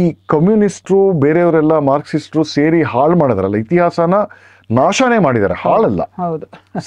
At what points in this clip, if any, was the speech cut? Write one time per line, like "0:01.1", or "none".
none